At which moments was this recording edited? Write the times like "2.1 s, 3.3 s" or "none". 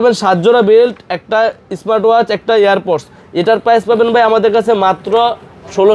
none